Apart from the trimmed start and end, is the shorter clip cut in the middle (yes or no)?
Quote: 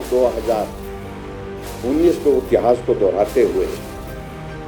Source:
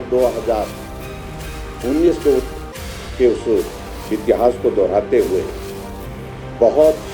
yes